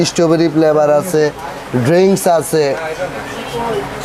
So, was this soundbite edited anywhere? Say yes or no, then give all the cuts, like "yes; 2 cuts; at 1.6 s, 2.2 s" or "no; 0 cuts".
no; 0 cuts